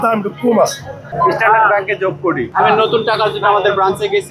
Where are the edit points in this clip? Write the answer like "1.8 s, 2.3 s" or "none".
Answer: 1.0 s, 2.5 s